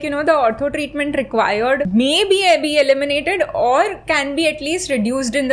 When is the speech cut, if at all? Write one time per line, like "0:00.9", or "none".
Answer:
0:01.9